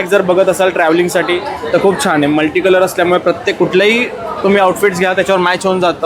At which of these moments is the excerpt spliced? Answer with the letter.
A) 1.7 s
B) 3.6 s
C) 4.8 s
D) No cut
D